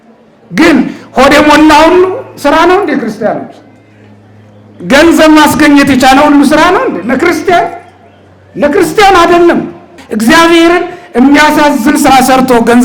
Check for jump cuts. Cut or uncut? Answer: cut